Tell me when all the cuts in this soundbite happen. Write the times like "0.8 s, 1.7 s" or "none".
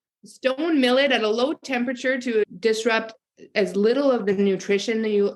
2.4 s